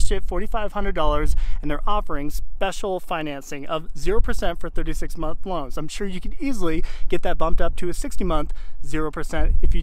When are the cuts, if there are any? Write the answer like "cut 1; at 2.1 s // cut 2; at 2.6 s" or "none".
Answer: none